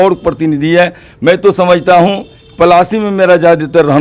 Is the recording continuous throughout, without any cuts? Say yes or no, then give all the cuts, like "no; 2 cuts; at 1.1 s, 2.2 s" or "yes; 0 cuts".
yes; 0 cuts